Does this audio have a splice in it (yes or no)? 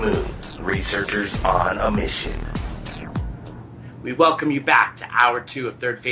no